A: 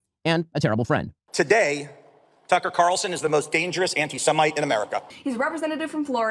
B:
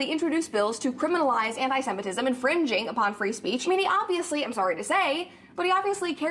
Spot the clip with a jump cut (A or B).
A